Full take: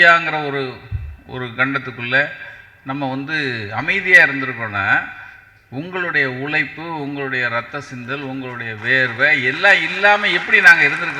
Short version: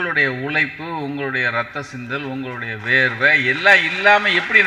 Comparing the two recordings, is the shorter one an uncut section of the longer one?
yes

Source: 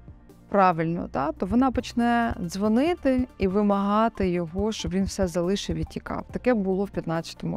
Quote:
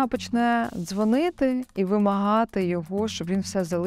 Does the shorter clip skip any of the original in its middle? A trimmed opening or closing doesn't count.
no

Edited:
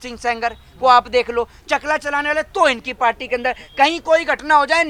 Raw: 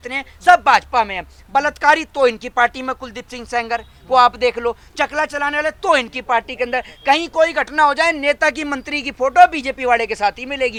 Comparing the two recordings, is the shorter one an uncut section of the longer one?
yes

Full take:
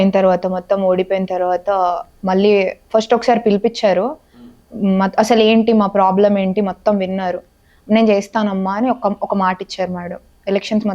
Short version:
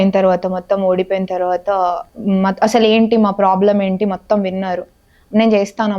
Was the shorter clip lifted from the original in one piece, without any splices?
no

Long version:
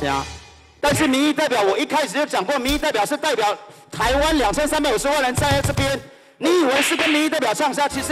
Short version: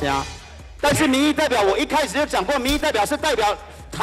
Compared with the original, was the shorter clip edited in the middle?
no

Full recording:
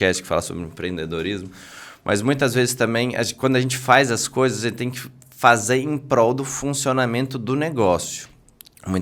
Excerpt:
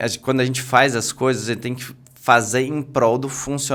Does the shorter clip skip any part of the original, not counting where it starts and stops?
no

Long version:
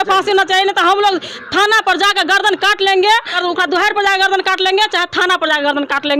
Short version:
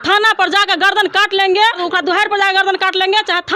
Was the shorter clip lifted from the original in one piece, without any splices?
no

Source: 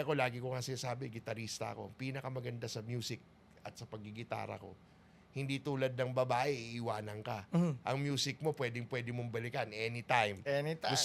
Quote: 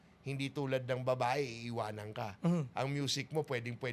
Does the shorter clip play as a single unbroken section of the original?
yes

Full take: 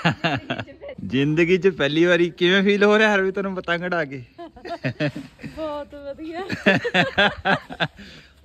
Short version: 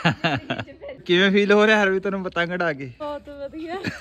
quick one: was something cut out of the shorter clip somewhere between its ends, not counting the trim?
yes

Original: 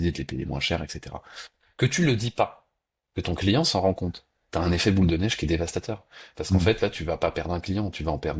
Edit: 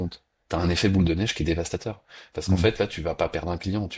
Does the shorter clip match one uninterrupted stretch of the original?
yes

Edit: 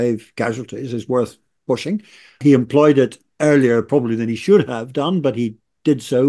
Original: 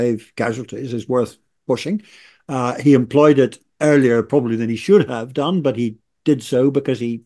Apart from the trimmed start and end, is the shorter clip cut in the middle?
yes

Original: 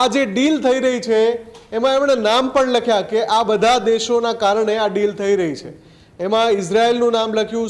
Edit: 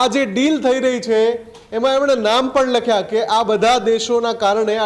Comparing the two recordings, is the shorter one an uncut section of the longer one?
yes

